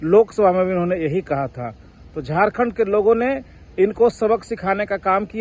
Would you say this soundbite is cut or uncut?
uncut